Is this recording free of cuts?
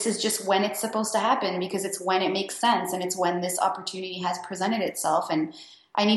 yes; 0 cuts

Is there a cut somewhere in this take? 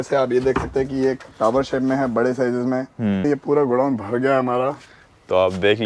yes; 1 cut; at 3.2 s

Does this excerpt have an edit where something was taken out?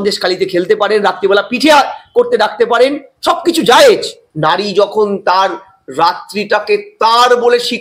no; 0 cuts

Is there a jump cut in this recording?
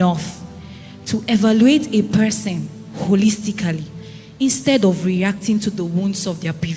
no; 0 cuts

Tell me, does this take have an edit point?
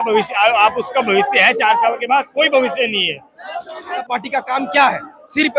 yes; 1 cut; at 4.0 s

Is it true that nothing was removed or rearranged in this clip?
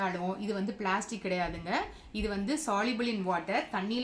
yes; 0 cuts

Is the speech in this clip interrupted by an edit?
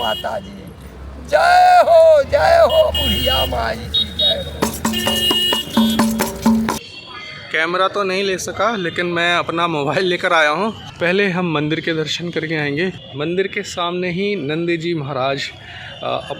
yes; 3 cuts; at 6.8 s, 10.9 s, 13.0 s

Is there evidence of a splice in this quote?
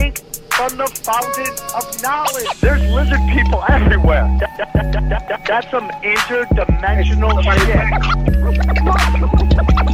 yes; 1 cut; at 0.9 s

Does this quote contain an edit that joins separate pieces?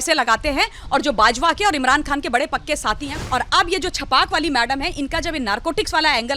yes; 1 cut; at 3.1 s

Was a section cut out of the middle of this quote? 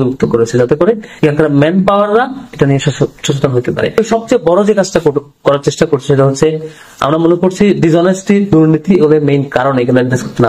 yes; 1 cut; at 4.0 s

